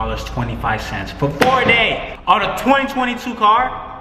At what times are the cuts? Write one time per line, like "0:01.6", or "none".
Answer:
none